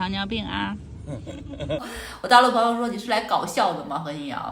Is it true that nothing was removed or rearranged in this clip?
no; 1 cut; at 1.8 s

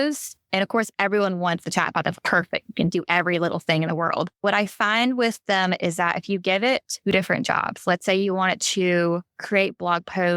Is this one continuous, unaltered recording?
no; 2 cuts; at 6.9 s, 9.3 s

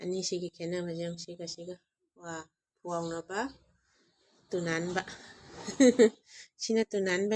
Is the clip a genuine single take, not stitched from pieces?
yes; 0 cuts

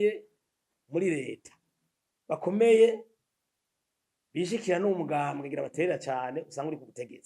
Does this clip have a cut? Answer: no; 0 cuts

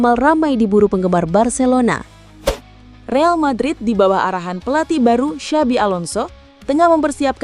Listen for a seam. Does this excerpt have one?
yes; 1 cut; at 2.6 s

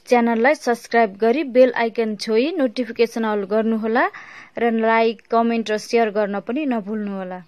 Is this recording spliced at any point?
no; 0 cuts

